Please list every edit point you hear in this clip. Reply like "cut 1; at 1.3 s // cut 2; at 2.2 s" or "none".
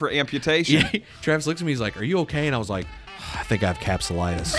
cut 1; at 1.1 s